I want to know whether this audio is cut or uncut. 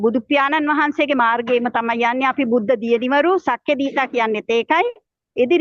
uncut